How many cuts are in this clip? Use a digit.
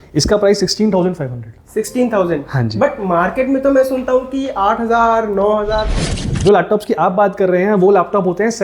1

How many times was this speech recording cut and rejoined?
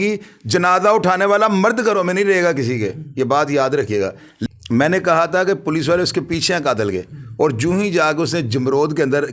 1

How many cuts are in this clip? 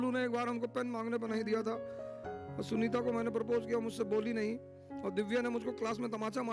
0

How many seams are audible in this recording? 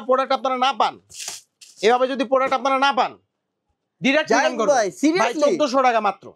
0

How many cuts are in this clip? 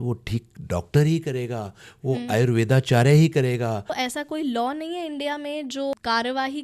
2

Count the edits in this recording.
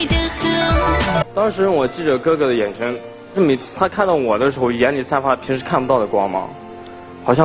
2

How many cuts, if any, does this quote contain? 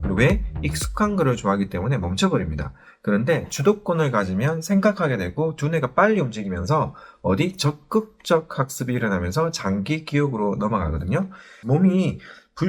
1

